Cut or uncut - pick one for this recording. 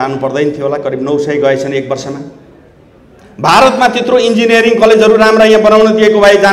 uncut